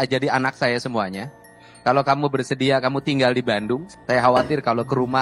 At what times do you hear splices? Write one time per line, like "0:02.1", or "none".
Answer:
0:03.9